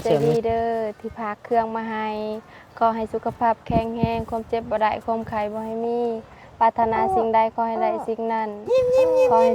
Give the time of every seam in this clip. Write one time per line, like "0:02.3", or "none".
0:08.5

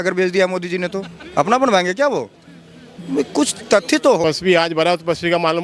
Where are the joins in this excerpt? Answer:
0:04.2

